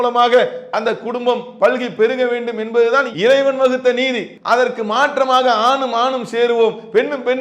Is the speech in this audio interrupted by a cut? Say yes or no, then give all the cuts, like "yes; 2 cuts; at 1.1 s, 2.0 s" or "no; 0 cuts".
yes; 1 cut; at 4.3 s